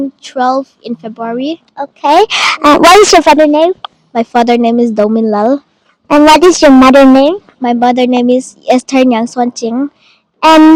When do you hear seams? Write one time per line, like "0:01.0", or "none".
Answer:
none